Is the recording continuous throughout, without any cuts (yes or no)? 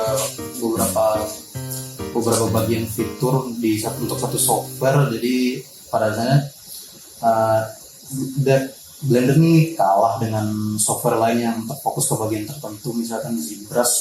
yes